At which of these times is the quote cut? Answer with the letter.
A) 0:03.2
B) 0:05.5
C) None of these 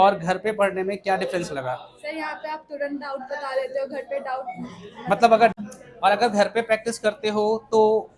B